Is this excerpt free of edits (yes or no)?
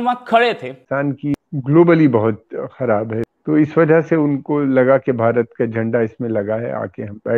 no